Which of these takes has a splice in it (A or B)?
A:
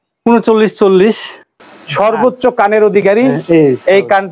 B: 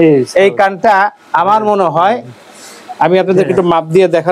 A